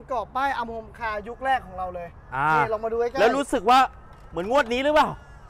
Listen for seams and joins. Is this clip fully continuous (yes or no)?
yes